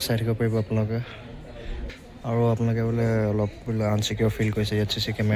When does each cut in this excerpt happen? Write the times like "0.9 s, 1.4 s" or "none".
1.8 s